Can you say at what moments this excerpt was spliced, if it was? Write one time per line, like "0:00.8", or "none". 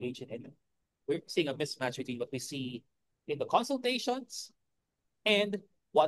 0:01.0